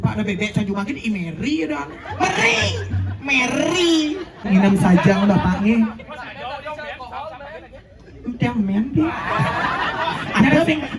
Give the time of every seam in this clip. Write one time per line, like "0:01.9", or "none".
0:04.5